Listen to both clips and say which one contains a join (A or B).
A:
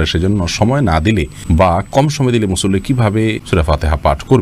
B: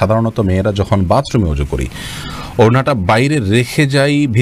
A